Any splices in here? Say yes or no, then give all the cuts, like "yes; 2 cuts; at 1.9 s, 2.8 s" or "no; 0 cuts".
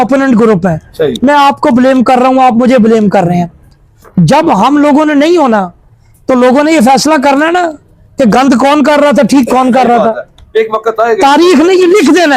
no; 0 cuts